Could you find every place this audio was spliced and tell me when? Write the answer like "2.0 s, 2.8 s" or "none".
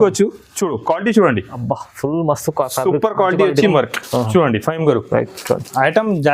3.7 s

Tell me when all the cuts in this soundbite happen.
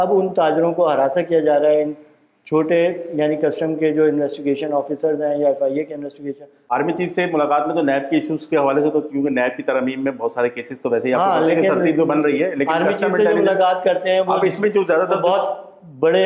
6.7 s

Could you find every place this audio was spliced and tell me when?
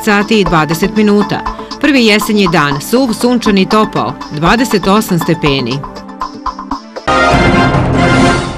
6.9 s

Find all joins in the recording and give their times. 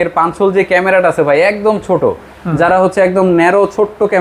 none

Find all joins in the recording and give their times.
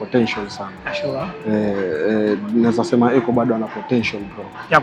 none

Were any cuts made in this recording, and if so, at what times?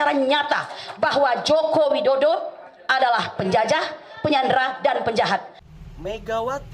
5.6 s

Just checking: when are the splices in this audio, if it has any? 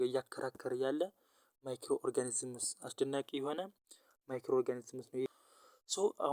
5.3 s

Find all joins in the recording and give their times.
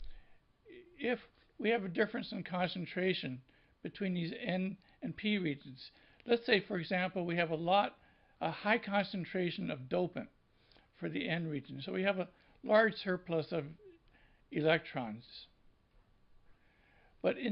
none

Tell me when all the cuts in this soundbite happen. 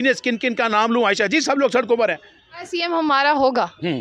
2.6 s

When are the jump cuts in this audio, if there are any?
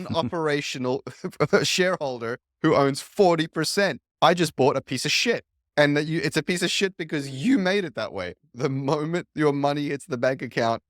4.0 s, 5.6 s, 8.5 s

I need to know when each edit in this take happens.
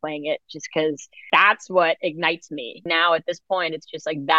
1.1 s, 2.8 s

